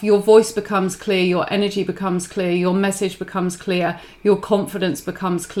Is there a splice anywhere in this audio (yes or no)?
no